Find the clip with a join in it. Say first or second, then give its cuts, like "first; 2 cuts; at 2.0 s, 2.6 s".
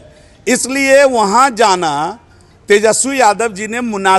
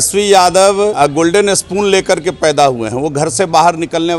second; 1 cut; at 0.9 s